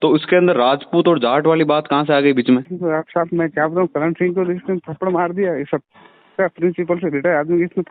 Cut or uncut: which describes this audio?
cut